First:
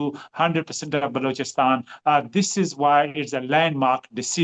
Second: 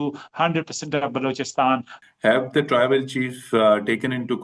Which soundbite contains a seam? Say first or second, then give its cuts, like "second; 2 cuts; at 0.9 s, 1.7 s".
second; 1 cut; at 1.9 s